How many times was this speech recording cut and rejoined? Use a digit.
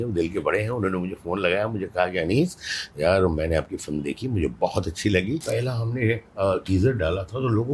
1